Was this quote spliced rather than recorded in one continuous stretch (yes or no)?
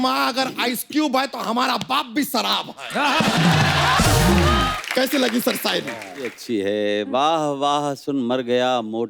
yes